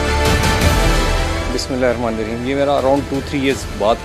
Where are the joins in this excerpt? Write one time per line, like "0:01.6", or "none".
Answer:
none